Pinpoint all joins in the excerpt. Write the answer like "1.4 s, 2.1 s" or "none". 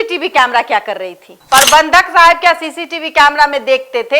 1.3 s